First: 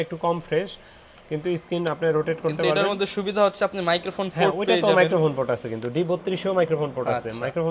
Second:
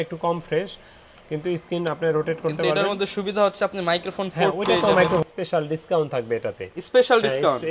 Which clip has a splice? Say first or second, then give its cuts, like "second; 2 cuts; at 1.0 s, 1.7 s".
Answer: second; 1 cut; at 5.2 s